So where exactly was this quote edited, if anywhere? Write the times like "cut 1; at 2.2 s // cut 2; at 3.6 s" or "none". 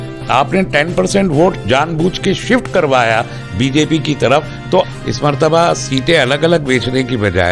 cut 1; at 4.9 s